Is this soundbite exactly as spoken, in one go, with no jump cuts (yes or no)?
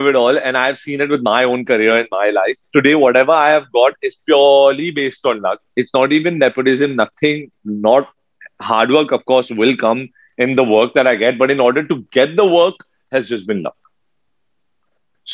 yes